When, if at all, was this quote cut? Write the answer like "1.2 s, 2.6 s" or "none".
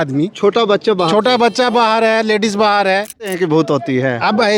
3.3 s